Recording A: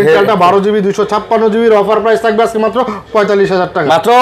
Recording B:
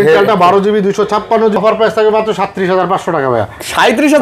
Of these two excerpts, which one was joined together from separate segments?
B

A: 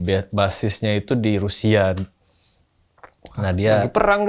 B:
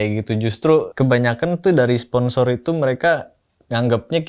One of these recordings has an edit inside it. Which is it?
B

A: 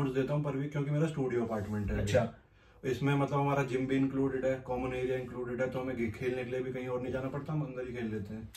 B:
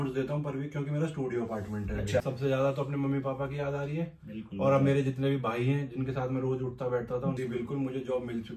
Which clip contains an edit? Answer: B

